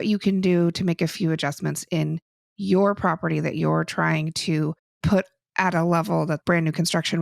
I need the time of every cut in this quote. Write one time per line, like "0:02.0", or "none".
0:04.9
0:06.4